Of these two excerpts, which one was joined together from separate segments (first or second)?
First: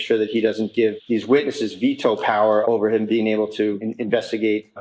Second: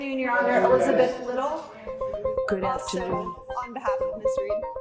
first